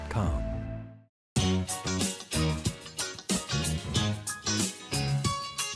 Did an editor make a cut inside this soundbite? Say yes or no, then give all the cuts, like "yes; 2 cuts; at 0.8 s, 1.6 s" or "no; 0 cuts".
yes; 1 cut; at 1.2 s